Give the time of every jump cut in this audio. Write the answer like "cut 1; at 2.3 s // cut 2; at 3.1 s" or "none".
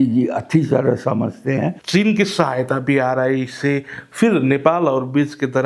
cut 1; at 1.8 s